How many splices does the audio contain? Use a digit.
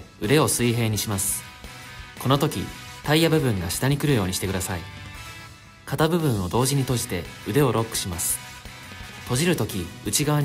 0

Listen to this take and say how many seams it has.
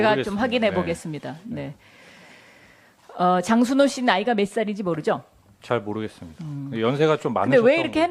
1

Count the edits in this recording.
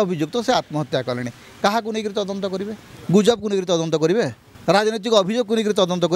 2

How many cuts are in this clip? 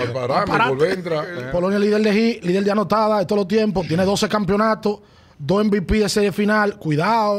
1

